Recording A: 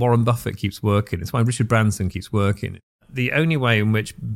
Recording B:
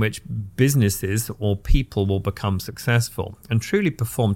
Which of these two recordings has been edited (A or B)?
A